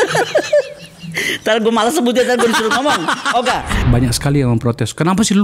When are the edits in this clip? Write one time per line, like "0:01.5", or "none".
0:03.8